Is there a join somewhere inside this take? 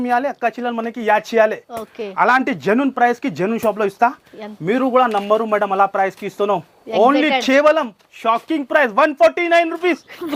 no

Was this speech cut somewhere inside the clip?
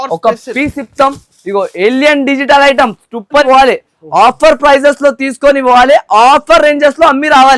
yes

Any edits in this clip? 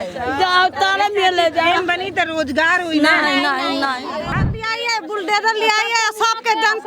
yes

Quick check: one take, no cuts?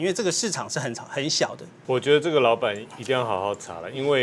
no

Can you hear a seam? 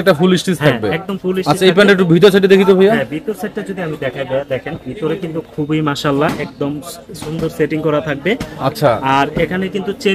no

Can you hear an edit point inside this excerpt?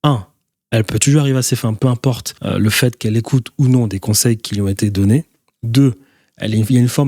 yes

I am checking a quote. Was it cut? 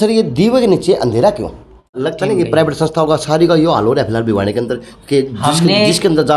yes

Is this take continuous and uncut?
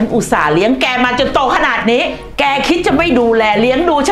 no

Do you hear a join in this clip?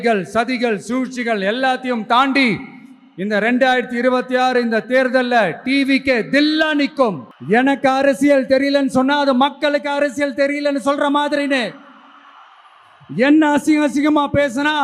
yes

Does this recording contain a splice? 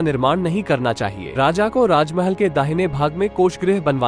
yes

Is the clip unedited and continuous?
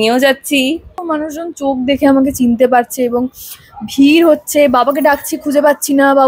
no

